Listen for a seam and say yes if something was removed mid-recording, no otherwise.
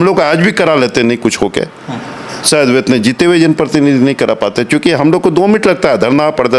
no